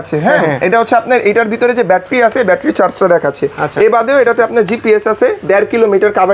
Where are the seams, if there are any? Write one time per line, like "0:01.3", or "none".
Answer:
none